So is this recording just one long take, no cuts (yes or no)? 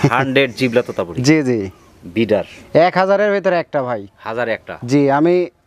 yes